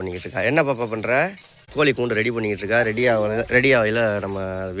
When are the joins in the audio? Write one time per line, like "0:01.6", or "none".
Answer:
0:01.7